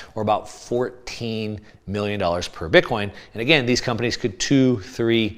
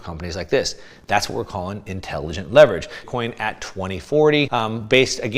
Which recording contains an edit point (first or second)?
second